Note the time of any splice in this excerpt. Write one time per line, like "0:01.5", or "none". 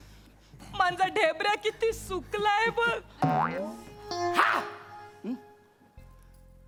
none